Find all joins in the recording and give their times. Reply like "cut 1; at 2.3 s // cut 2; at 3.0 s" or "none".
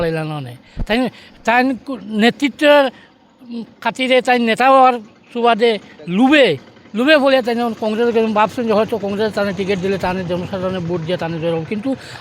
none